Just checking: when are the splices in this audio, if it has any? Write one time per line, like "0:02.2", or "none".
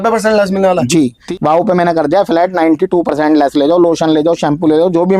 0:01.2